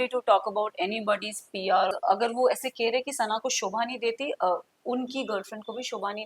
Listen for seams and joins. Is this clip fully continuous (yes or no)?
no